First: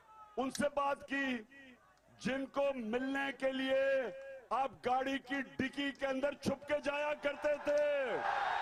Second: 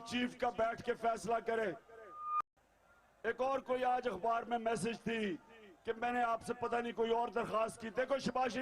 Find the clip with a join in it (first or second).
second